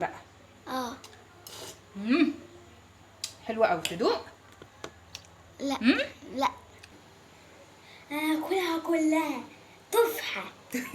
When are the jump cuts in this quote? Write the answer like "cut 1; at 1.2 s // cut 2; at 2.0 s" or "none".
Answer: cut 1; at 6.9 s